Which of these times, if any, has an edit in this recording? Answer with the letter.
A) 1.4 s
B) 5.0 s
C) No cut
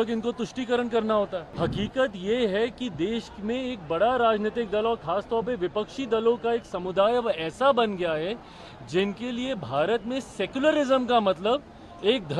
A